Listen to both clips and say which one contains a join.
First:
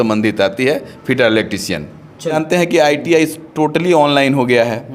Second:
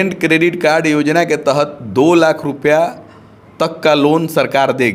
first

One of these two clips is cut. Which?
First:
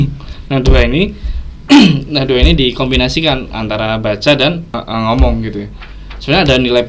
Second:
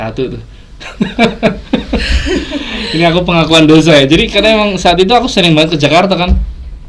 first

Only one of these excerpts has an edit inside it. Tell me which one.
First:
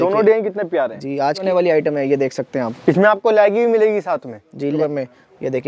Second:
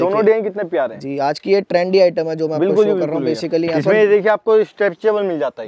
first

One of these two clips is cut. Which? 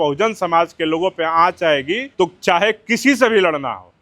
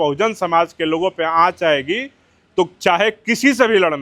first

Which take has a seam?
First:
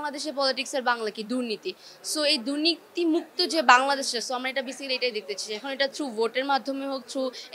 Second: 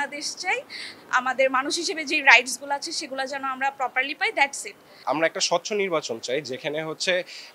second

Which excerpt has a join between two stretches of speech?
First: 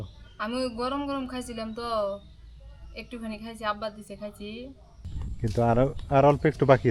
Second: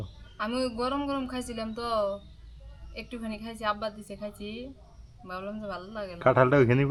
first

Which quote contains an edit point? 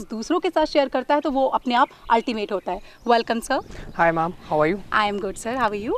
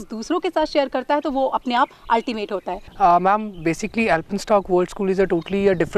second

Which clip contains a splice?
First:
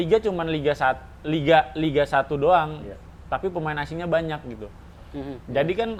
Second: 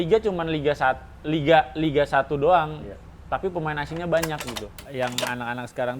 second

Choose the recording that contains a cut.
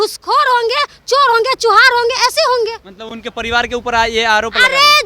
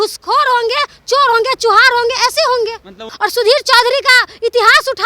second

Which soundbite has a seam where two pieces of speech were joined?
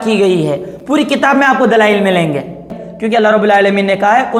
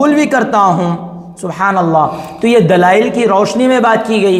first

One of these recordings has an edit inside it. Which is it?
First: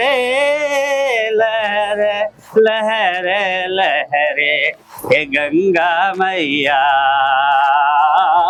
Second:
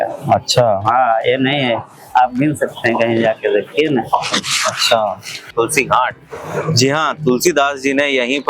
second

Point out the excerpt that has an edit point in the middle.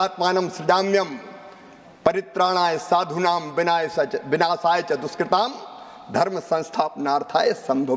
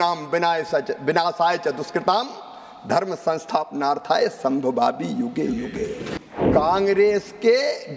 second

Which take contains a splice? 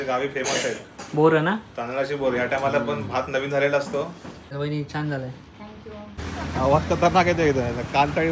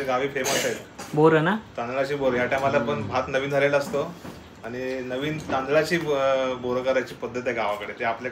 first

